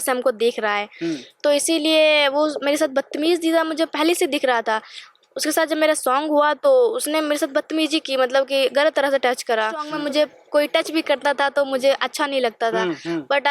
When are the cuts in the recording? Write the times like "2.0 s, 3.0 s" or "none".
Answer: 9.9 s